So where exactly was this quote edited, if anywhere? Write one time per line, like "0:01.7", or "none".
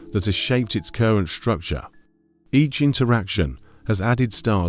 none

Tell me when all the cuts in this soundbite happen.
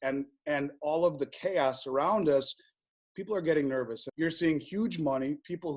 0:04.0

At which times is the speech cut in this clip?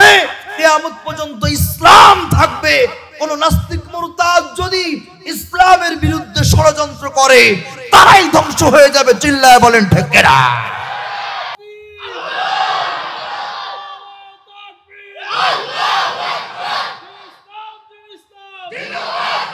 0:11.6

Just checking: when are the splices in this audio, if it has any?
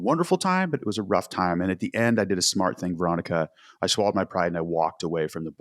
none

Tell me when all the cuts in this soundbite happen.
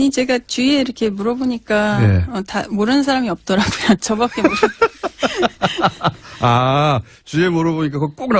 0:04.1

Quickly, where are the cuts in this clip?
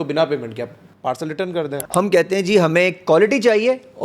0:01.6

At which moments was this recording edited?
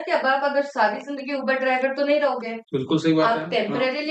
none

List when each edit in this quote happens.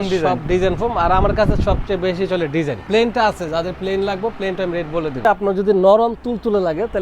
0:02.8
0:05.2

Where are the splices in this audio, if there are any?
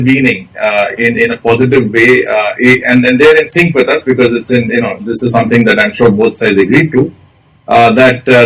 none

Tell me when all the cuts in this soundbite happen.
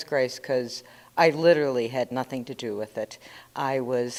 none

